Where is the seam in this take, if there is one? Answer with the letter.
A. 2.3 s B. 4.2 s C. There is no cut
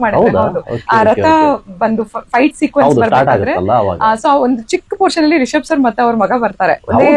C